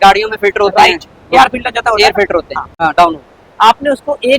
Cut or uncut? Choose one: cut